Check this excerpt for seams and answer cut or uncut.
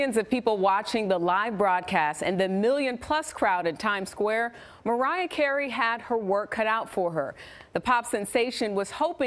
cut